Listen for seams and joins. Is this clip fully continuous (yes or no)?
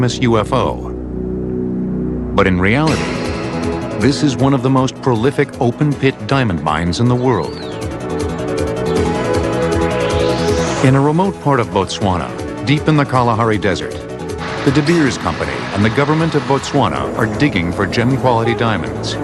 no